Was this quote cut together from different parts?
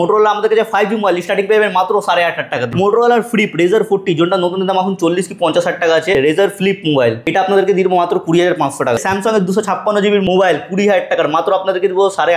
yes; 5 cuts; at 2.6 s, 6.1 s, 7.2 s, 9.0 s, 10.2 s

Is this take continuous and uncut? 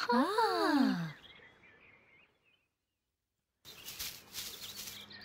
no; 1 cut; at 3.6 s

